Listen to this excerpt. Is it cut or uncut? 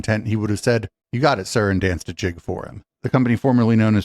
cut